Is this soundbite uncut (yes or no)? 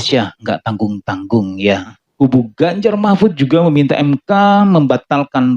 no